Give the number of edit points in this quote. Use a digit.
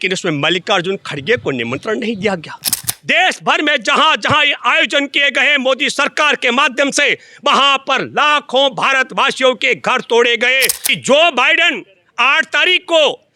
2